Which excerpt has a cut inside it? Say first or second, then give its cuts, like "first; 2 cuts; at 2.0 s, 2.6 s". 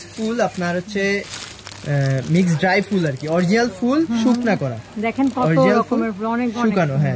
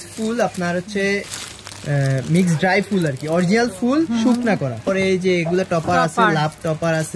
second; 1 cut; at 4.8 s